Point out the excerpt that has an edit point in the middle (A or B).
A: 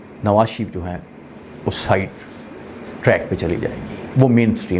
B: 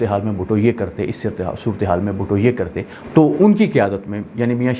B